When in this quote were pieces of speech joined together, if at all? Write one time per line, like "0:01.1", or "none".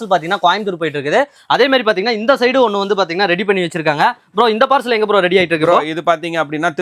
none